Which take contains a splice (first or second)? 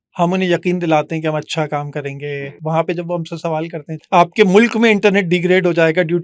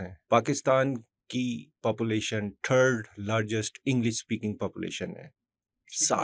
first